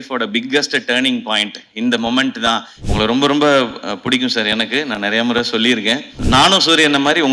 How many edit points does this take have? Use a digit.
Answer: 2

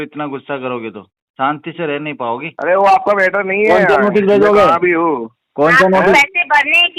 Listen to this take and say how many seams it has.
1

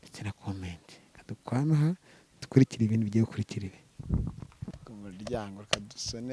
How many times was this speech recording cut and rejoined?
1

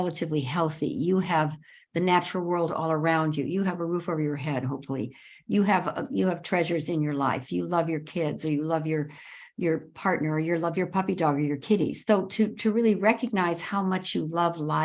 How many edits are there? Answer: 1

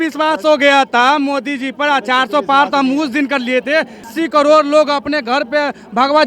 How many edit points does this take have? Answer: 1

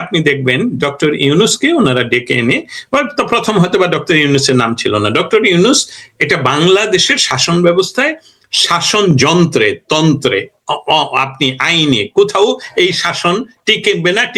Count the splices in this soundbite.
0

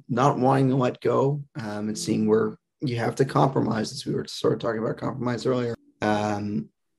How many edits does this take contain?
1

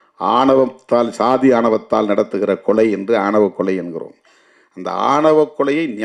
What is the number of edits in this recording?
0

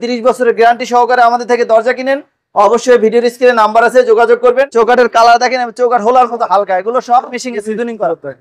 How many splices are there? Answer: 1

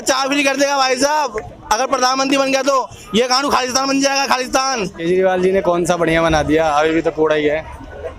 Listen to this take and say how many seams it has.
1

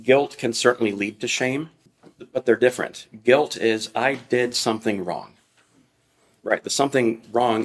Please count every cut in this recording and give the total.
0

